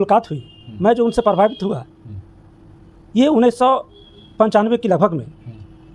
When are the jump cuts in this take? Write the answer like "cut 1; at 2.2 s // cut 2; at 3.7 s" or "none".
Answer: none